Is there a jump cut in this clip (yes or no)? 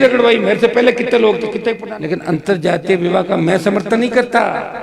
yes